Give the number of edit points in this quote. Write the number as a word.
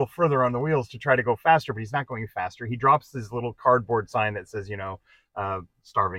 zero